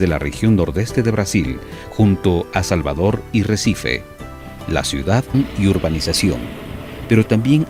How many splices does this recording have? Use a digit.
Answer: 0